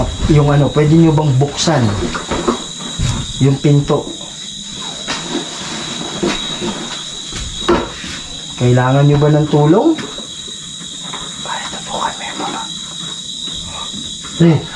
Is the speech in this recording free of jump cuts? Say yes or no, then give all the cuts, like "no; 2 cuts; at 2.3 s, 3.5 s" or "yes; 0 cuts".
yes; 0 cuts